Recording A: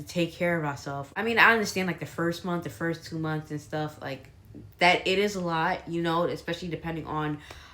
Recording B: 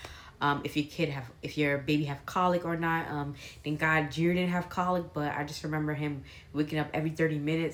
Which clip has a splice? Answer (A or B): A